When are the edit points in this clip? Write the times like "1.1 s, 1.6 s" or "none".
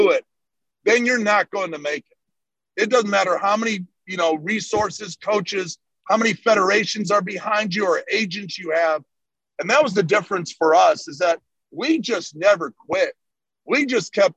9.2 s